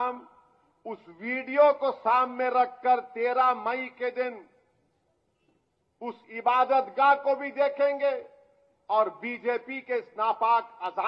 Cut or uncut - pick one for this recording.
uncut